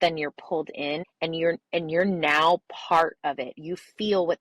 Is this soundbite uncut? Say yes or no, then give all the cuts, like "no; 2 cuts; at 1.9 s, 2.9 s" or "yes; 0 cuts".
no; 1 cut; at 1.0 s